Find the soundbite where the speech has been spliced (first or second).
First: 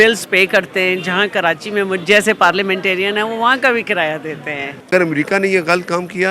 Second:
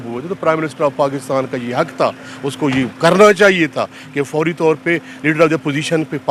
first